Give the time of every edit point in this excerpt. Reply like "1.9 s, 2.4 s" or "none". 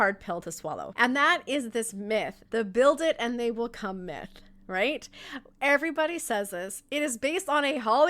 0.9 s, 2.4 s